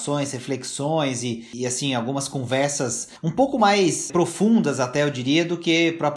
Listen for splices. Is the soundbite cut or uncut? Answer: cut